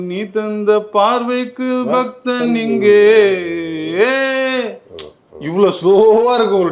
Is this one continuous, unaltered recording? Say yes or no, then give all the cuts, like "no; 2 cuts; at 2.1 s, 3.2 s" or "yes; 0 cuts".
yes; 0 cuts